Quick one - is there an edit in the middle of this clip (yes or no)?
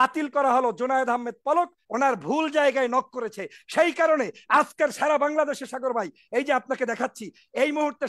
yes